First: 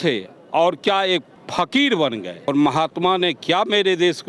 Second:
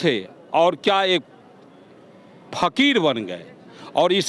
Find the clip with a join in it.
first; 2 cuts; at 1.4 s, 2.5 s

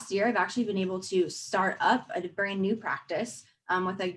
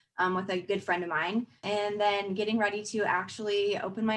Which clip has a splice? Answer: second; 1 cut; at 1.6 s

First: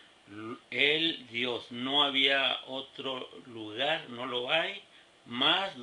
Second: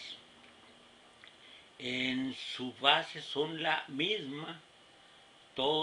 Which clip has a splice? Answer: first; 1 cut; at 3.8 s

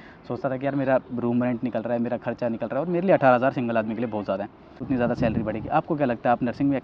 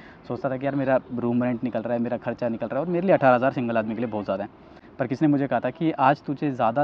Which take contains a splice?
first; 1 cut; at 4.8 s

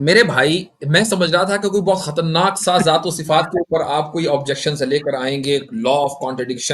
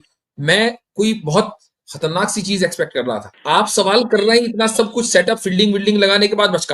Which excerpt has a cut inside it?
second; 1 cut; at 3.3 s

